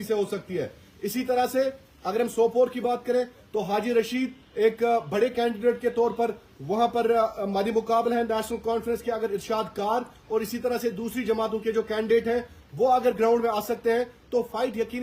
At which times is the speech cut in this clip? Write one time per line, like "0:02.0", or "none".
none